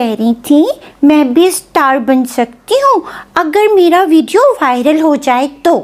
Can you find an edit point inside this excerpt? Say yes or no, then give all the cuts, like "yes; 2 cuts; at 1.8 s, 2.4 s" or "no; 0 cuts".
no; 0 cuts